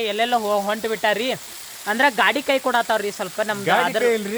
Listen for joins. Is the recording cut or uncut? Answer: uncut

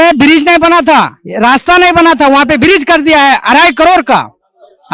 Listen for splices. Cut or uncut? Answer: uncut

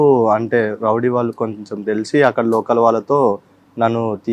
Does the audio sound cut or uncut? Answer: uncut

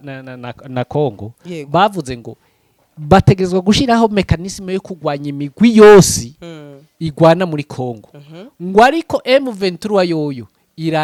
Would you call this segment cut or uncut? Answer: uncut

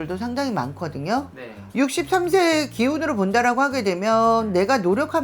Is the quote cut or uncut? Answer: cut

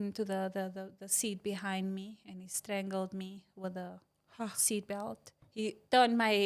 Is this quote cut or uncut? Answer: cut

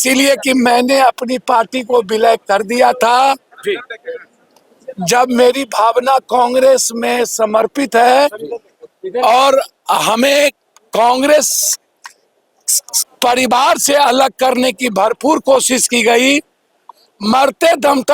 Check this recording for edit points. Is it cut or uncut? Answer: uncut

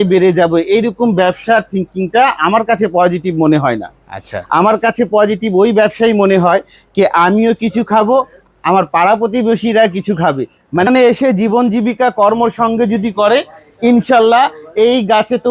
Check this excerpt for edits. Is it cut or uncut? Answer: cut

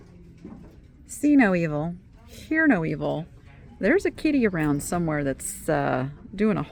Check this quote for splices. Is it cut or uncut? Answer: uncut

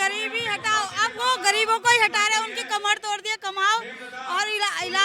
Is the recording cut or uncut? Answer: uncut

